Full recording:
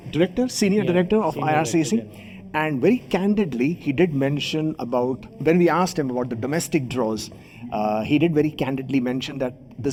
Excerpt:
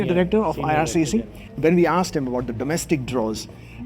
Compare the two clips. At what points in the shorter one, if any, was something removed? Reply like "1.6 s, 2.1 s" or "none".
1.4 s